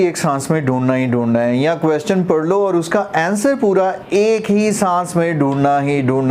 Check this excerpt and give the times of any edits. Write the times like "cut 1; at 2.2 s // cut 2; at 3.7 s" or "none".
none